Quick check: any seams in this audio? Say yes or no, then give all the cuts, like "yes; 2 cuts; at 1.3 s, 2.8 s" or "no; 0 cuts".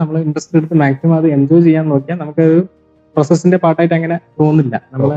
no; 0 cuts